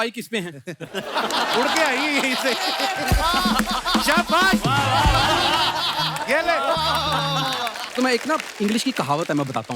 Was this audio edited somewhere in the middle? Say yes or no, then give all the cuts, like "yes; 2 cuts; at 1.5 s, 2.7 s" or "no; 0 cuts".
yes; 1 cut; at 7.8 s